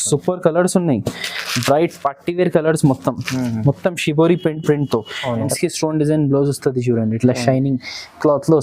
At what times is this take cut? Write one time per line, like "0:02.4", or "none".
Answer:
0:05.5

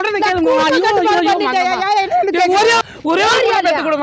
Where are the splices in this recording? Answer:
0:02.8

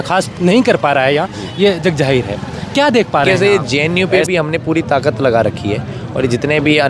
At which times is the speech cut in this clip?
0:03.3

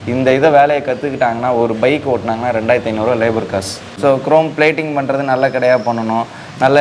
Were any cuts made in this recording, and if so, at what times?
0:03.9

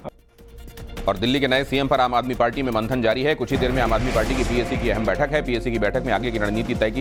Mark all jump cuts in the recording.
none

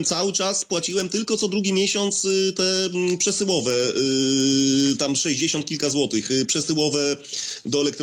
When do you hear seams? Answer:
none

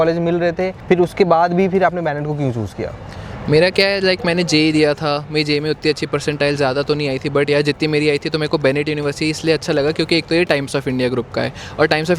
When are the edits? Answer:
none

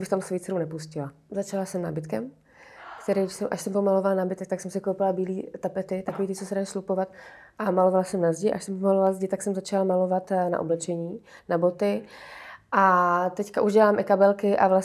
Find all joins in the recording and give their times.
0:01.2

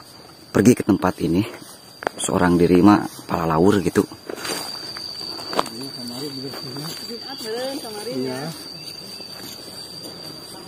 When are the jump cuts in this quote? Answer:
0:04.4

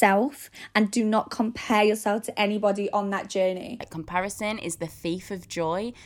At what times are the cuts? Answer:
0:03.8

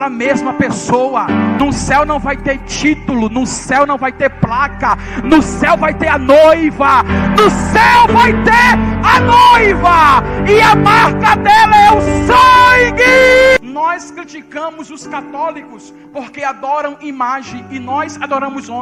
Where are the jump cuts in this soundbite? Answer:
0:01.6
0:13.6

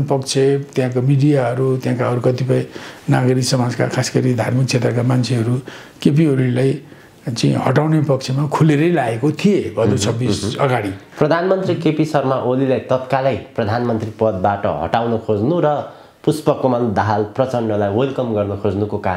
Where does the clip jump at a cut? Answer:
0:11.0

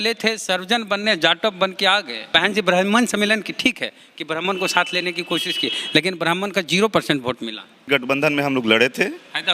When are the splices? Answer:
0:02.2
0:07.8

